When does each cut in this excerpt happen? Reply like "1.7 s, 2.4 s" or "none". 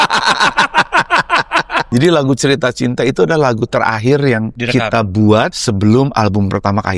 1.9 s, 4.5 s, 5.6 s